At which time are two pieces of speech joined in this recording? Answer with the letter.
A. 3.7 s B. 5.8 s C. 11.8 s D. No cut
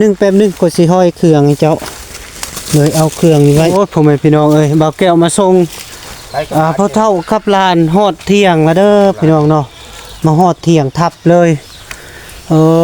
A